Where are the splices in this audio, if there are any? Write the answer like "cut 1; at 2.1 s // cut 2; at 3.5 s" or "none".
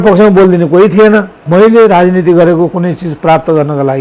cut 1; at 1.4 s